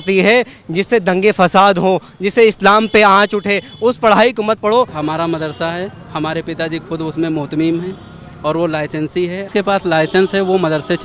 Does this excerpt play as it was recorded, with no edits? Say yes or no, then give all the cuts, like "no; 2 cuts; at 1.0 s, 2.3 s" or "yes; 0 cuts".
no; 2 cuts; at 4.9 s, 9.5 s